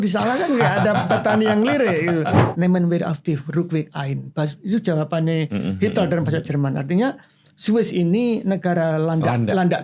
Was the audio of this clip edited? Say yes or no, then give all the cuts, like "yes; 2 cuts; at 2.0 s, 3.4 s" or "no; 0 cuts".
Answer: yes; 1 cut; at 2.4 s